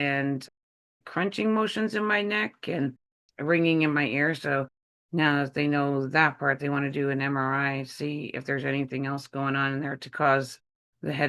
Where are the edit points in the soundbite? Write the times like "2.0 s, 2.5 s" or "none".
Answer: none